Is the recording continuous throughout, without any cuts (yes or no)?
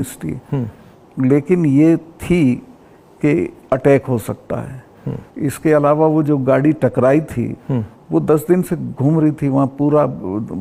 yes